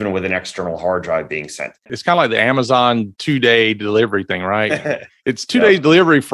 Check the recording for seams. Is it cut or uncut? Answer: cut